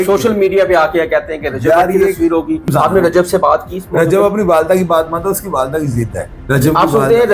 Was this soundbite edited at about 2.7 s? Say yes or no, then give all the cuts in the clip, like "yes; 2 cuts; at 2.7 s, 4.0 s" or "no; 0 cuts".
yes; 2 cuts; at 2.7 s, 6.3 s